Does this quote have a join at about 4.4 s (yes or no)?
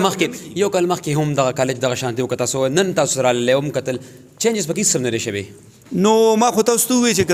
no